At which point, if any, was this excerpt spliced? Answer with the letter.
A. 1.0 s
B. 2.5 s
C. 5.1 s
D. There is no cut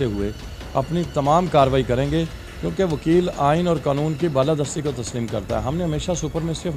D